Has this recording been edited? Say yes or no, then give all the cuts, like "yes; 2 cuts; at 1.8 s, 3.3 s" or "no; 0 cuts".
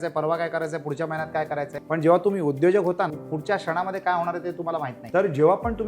yes; 3 cuts; at 1.8 s, 3.2 s, 5.0 s